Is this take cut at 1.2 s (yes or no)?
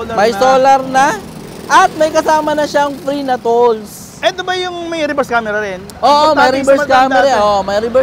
no